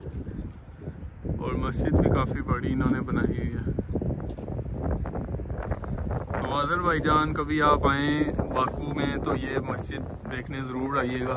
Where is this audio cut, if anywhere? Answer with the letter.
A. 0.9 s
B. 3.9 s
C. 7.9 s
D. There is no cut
D